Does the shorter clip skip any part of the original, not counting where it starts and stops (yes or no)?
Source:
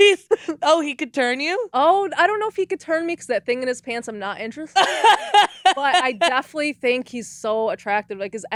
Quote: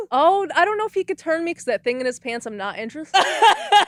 no